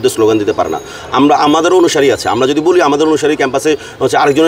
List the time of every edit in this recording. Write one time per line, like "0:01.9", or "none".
none